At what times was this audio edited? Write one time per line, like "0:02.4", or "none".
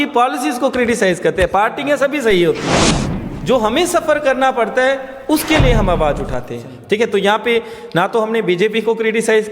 0:03.0